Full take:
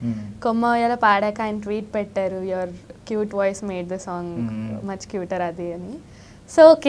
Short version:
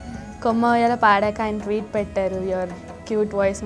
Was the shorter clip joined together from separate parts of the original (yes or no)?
no